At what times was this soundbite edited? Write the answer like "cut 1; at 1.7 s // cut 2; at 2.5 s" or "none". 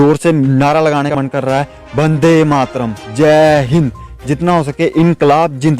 cut 1; at 1.1 s